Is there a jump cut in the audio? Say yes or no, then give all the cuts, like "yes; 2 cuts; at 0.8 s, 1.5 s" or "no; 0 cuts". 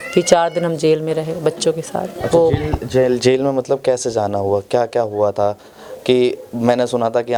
no; 0 cuts